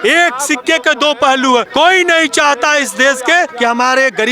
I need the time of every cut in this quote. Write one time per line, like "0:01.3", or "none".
0:01.7
0:03.5